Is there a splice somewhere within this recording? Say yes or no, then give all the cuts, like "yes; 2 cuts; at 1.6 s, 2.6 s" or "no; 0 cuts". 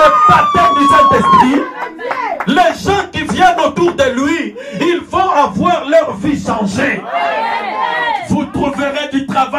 no; 0 cuts